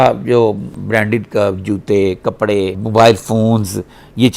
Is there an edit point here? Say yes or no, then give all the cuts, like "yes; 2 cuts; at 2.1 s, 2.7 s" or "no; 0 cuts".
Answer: no; 0 cuts